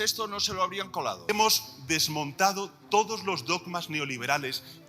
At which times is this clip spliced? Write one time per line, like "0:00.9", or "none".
0:01.3